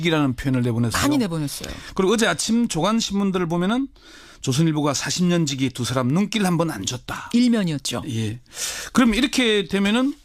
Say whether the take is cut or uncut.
cut